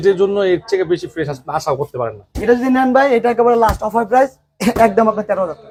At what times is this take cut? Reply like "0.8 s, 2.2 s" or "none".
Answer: none